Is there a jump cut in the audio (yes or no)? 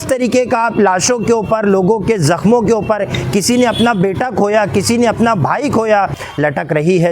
yes